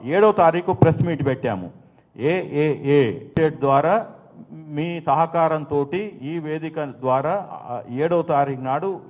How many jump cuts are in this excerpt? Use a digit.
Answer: 1